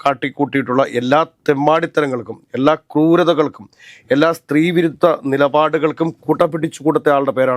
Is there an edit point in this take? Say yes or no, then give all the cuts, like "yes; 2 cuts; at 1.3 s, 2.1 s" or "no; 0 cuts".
no; 0 cuts